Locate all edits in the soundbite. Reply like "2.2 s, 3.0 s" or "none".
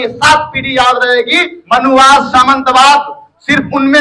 1.5 s